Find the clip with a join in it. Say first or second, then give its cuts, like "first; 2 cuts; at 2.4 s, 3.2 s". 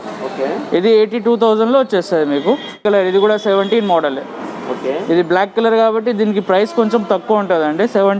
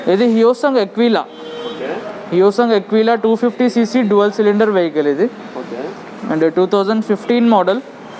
first; 1 cut; at 2.8 s